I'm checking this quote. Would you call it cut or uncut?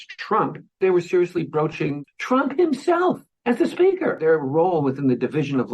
cut